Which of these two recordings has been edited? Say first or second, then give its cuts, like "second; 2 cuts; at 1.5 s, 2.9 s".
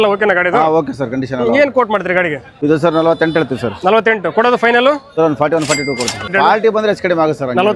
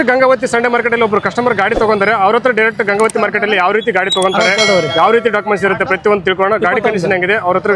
first; 3 cuts; at 2.4 s, 5.1 s, 6.3 s